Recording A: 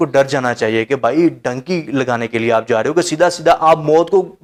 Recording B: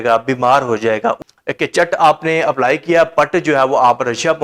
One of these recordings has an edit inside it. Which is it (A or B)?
B